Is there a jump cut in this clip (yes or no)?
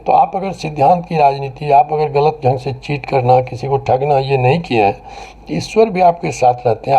no